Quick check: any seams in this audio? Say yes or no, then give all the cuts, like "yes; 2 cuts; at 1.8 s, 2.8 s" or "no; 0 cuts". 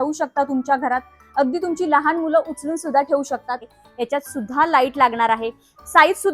yes; 1 cut; at 3.6 s